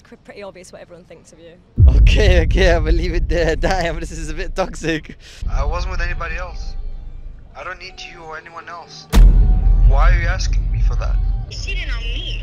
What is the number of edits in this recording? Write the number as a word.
two